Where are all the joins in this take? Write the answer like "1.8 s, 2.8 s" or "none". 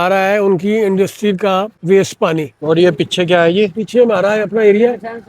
1.7 s, 2.6 s